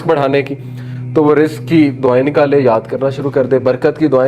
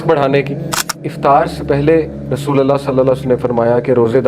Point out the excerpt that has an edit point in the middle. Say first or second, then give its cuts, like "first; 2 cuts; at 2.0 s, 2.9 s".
second; 1 cut; at 1.0 s